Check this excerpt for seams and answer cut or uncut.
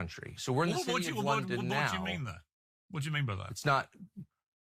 uncut